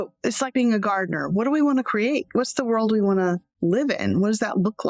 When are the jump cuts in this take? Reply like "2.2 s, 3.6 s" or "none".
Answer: none